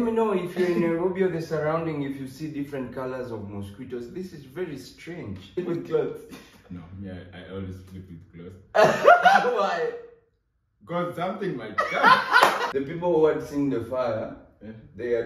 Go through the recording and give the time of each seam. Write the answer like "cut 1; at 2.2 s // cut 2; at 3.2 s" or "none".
cut 1; at 5.6 s // cut 2; at 12.7 s